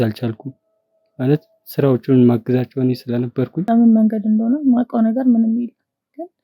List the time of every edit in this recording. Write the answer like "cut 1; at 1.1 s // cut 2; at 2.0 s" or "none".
cut 1; at 3.6 s